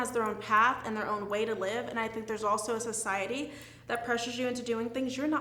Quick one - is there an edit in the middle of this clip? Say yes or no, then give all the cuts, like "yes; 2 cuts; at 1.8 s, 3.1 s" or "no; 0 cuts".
no; 0 cuts